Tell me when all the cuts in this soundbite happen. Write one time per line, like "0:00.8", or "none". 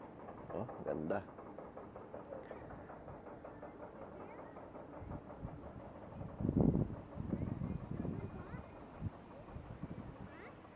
none